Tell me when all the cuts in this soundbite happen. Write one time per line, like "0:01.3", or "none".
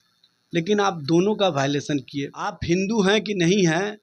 0:02.6